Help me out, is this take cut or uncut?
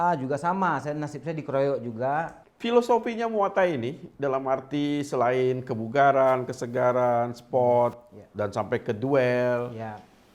cut